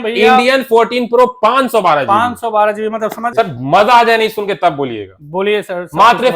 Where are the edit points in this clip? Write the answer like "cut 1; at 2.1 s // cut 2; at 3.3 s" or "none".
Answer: cut 1; at 3.2 s